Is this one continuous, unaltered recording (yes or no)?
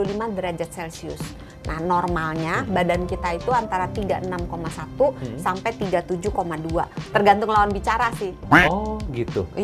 yes